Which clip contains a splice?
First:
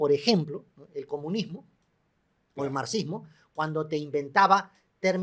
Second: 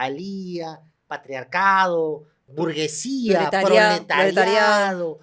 second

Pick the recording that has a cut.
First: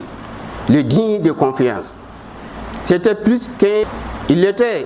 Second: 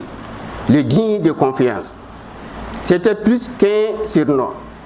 first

